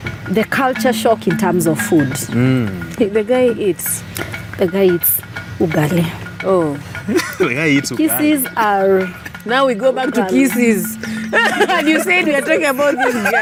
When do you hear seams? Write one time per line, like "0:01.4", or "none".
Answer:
none